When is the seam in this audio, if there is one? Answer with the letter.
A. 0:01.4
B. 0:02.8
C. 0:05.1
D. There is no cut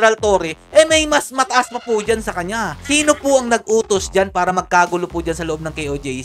B